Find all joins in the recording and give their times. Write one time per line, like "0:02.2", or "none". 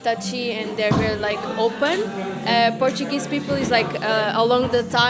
none